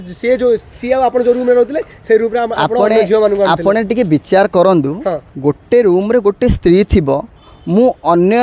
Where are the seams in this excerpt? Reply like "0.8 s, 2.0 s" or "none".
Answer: none